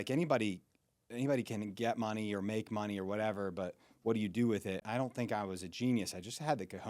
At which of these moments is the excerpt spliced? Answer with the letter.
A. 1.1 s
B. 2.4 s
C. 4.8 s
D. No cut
C